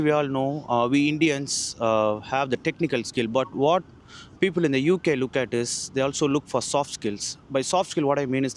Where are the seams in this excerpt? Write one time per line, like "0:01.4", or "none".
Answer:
none